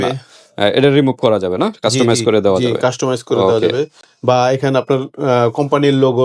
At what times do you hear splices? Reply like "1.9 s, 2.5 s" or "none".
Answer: none